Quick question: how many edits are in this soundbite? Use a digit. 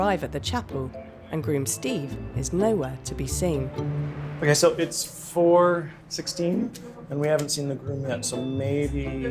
0